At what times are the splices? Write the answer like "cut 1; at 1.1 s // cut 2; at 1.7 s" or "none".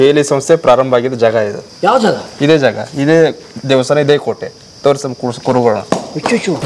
cut 1; at 1.6 s